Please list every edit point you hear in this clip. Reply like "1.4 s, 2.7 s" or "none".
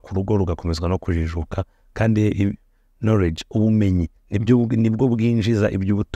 none